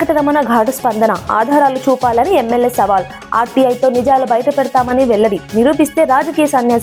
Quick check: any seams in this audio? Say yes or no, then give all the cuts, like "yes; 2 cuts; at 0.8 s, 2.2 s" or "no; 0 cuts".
no; 0 cuts